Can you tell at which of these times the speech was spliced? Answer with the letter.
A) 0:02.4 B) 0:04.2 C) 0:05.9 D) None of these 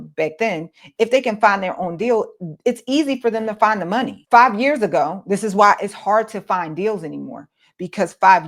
B